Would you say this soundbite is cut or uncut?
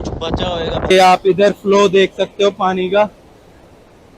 cut